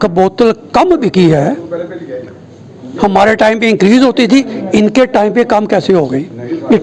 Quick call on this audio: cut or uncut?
uncut